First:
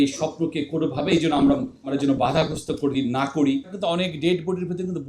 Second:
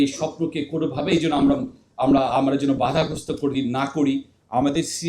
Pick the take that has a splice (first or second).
first